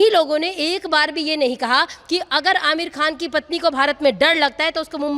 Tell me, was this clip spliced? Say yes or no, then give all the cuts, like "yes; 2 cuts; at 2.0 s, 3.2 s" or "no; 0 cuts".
no; 0 cuts